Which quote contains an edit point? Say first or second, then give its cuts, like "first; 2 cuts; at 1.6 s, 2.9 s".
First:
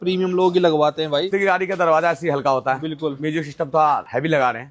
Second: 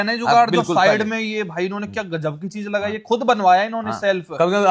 first; 1 cut; at 1.3 s